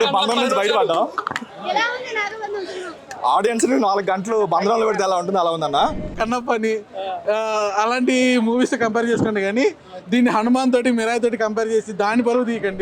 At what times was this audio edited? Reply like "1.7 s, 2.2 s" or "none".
6.1 s